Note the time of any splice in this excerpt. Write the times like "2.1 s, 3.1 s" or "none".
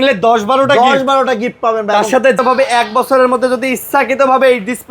2.4 s